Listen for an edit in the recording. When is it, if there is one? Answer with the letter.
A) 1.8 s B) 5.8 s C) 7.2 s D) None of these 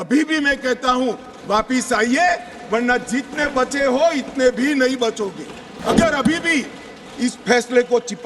B